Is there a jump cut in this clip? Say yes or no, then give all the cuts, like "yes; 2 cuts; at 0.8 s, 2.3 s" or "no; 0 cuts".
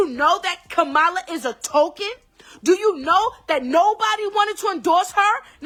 no; 0 cuts